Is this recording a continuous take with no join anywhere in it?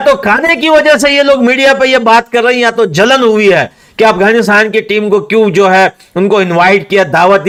yes; 0 cuts

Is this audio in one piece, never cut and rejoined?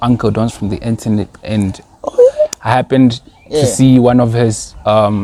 yes; 0 cuts

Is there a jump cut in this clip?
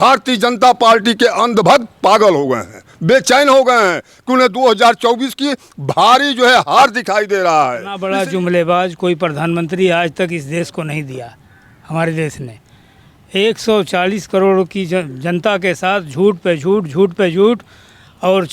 yes; 1 cut; at 8.0 s

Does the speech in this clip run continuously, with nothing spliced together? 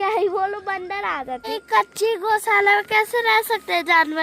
no; 1 cut; at 1.4 s

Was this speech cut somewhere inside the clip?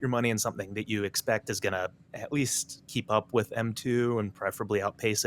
yes; 1 cut; at 2.1 s

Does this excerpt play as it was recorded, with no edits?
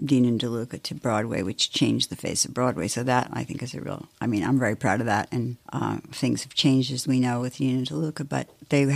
no; 1 cut; at 5.6 s

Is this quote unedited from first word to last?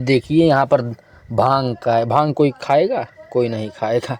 yes; 0 cuts

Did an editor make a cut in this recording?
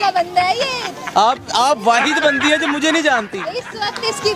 no; 0 cuts

